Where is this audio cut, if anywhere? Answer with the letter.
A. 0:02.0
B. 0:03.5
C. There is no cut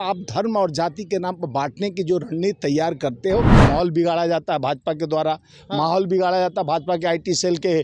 B